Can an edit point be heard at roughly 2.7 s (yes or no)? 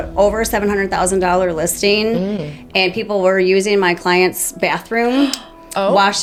no